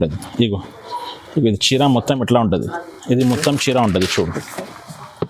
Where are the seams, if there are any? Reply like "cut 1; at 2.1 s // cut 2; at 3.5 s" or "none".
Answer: none